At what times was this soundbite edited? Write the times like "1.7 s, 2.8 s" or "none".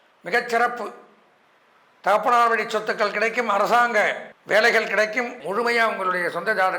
4.3 s, 5.4 s